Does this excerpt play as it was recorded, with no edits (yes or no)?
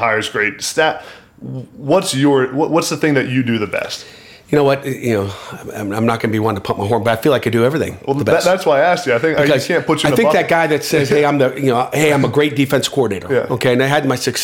yes